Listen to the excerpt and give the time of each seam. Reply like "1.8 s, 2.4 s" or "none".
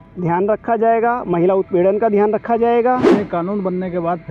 3.1 s